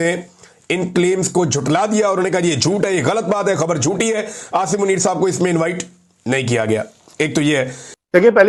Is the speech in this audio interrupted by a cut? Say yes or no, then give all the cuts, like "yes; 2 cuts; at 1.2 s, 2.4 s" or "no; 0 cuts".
no; 0 cuts